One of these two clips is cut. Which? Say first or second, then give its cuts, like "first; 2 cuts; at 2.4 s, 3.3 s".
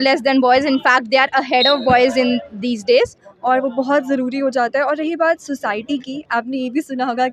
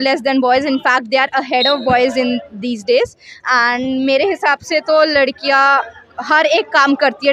first; 1 cut; at 3.3 s